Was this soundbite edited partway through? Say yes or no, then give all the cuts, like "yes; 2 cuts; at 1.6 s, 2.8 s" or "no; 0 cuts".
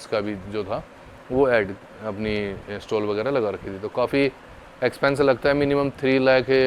no; 0 cuts